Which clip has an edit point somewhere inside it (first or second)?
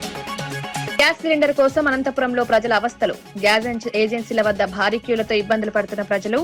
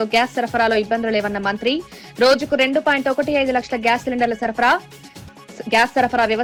first